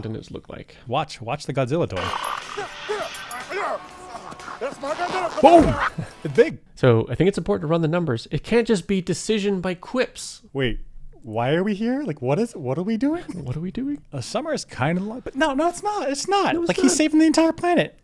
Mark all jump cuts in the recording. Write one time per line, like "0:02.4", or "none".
0:00.8
0:06.6
0:10.4
0:14.1